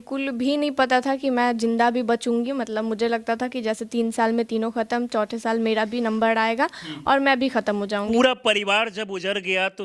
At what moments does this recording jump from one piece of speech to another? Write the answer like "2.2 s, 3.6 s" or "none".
8.0 s